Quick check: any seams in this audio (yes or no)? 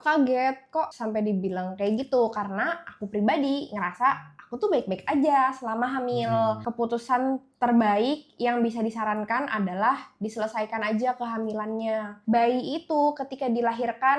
yes